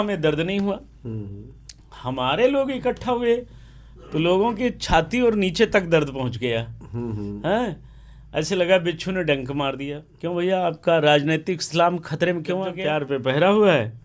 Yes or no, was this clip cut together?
yes